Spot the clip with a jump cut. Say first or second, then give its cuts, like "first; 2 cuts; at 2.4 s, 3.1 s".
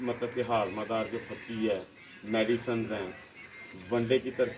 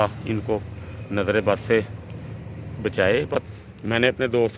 second; 1 cut; at 3.5 s